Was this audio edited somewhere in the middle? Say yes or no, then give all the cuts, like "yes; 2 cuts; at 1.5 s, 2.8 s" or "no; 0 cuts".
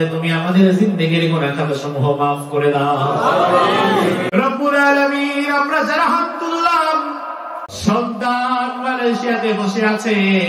yes; 2 cuts; at 4.3 s, 7.6 s